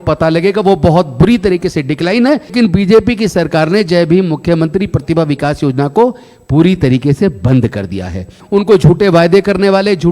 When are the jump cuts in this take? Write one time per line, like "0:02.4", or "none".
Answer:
0:02.5
0:08.4